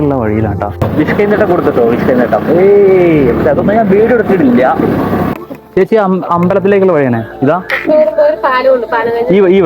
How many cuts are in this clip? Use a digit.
2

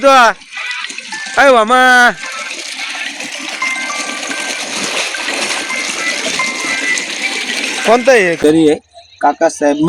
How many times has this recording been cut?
1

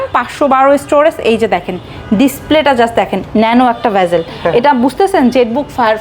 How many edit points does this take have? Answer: 0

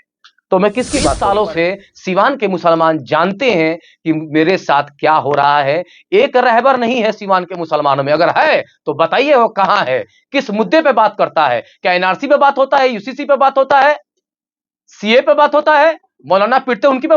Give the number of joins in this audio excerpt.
1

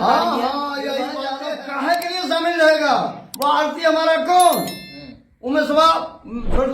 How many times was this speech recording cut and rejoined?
1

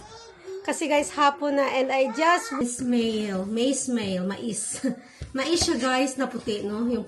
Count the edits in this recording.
1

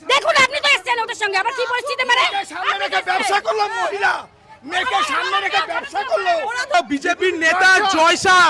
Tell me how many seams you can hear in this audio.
1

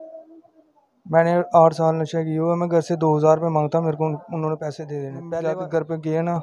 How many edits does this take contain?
1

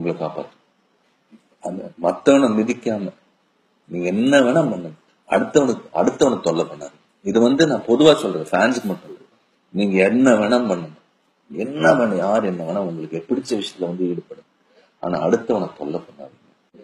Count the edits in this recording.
1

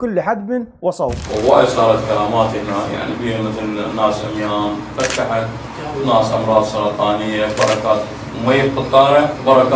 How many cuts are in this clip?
1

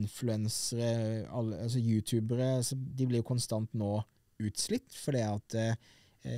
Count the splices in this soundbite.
0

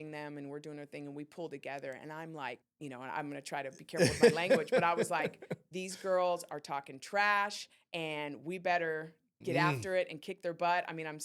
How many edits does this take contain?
1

